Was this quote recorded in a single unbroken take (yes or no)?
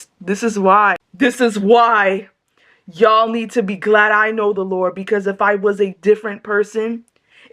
no